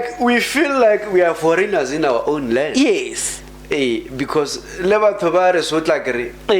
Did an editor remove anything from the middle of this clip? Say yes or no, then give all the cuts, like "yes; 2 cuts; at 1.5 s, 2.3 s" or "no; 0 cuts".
no; 0 cuts